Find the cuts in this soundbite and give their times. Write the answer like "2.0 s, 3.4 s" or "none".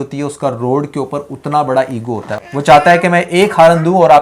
2.4 s